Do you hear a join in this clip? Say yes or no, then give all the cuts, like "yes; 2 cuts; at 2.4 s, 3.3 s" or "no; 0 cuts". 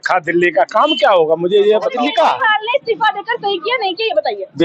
yes; 1 cut; at 1.9 s